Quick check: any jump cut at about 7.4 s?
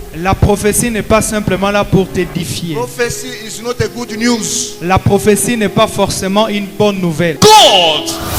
yes; 1 cut; at 7.4 s

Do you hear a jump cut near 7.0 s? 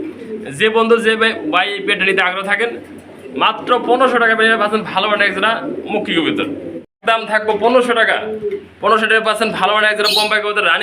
yes; 1 cut; at 7.0 s

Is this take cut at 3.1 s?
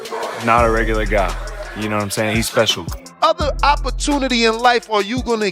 yes; 1 cut; at 3.1 s

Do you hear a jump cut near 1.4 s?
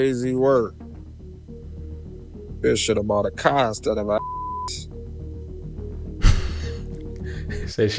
no; 0 cuts

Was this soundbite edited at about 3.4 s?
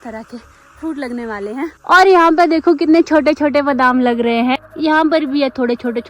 no; 2 cuts; at 1.7 s, 4.6 s

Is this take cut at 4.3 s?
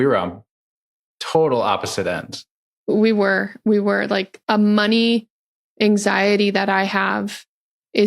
yes; 1 cut; at 4.3 s

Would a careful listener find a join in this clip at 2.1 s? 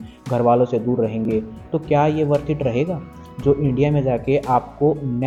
no; 0 cuts

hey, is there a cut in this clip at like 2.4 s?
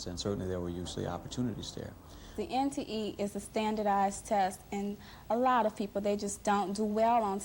yes; 1 cut; at 2.4 s

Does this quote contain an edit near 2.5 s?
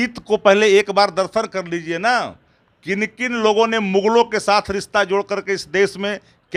no; 0 cuts

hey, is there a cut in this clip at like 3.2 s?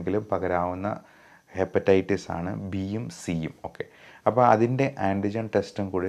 no; 0 cuts

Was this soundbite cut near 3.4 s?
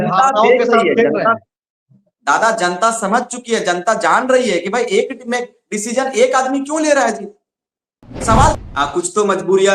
no; 1 cut; at 8.6 s

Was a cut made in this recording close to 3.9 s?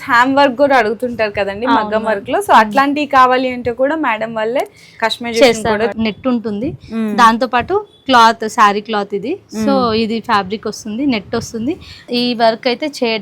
no; 2 cuts; at 5.9 s, 12.0 s

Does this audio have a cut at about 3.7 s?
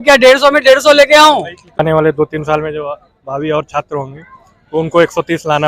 no; 1 cut; at 1.8 s

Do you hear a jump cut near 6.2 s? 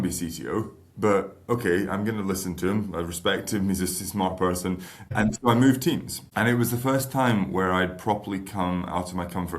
yes; 1 cut; at 6.2 s

